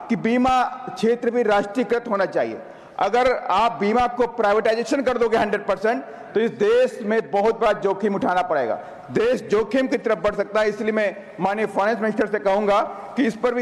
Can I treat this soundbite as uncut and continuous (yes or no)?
yes